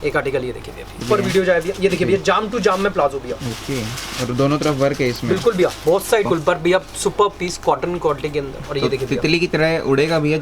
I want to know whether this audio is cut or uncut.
cut